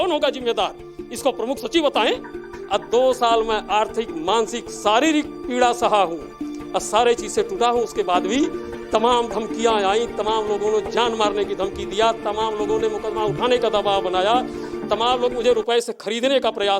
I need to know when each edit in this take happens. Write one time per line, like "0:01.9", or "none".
0:02.5